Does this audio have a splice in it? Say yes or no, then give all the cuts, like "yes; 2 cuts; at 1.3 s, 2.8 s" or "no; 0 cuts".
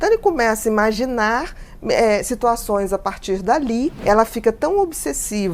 yes; 1 cut; at 4.0 s